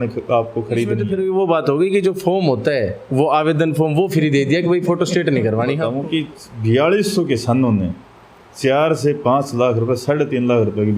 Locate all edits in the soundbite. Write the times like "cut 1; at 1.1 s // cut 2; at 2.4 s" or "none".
cut 1; at 1.0 s // cut 2; at 5.9 s